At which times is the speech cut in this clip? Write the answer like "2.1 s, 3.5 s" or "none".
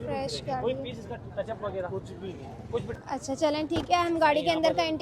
2.9 s